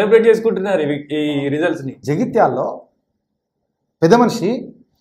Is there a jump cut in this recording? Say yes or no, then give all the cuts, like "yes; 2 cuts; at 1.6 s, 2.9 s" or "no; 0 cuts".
yes; 1 cut; at 1.9 s